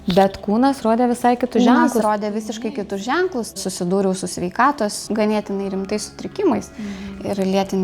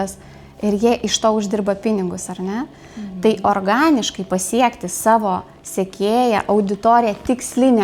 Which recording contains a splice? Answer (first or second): first